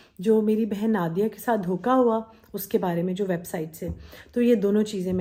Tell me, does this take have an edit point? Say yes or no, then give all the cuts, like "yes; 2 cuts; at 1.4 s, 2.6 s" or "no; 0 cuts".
no; 0 cuts